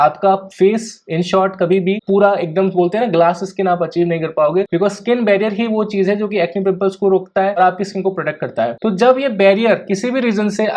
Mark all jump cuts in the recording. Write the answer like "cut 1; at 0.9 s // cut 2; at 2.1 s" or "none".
cut 1; at 2.0 s